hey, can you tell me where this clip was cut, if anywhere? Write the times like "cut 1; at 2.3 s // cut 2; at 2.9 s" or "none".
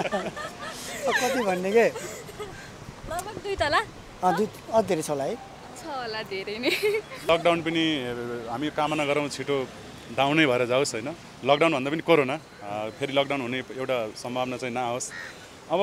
cut 1; at 7.3 s